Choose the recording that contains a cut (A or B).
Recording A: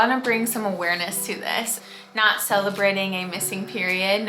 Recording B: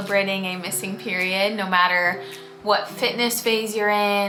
A